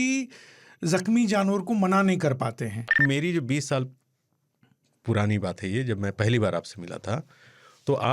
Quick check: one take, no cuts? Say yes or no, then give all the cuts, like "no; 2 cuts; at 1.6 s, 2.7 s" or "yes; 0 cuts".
no; 1 cut; at 3.0 s